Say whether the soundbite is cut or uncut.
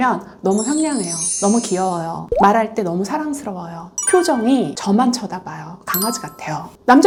uncut